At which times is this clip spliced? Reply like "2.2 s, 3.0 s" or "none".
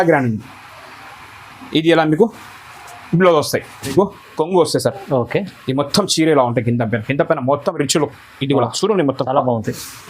3.9 s